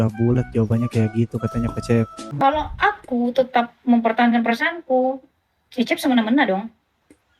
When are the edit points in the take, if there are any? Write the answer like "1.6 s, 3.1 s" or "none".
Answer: 2.3 s